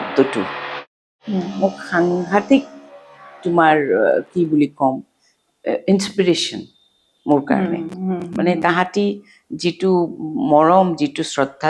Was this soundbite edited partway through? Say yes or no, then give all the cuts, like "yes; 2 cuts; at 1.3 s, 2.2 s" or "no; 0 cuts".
no; 0 cuts